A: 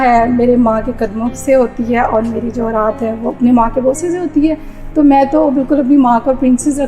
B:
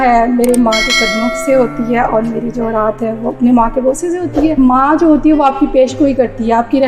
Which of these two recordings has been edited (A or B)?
B